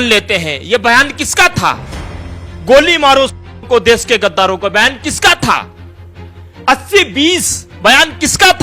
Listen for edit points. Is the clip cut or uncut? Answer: uncut